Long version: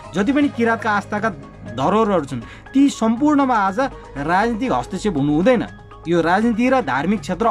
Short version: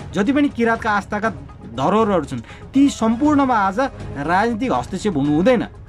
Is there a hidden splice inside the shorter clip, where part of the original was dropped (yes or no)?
no